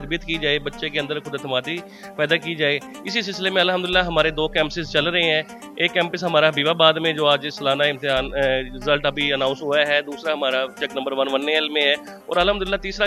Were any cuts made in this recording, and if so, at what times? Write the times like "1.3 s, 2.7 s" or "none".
none